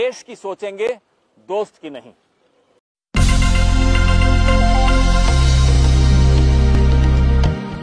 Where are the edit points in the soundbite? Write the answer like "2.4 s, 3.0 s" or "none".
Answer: none